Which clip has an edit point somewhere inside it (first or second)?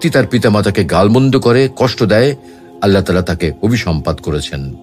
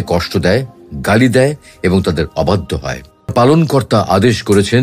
second